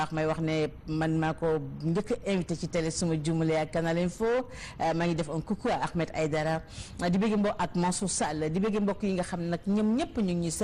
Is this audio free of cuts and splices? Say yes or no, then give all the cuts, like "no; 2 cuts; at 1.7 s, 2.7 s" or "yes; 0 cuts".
yes; 0 cuts